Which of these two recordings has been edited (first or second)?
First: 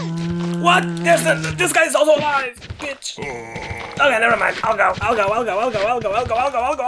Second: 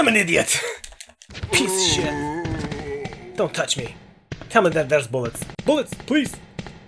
second